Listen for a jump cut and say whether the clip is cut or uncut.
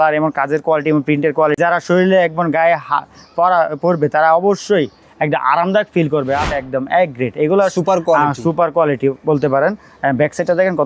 cut